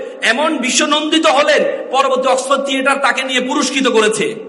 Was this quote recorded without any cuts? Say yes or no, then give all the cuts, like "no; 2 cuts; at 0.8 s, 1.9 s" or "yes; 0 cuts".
yes; 0 cuts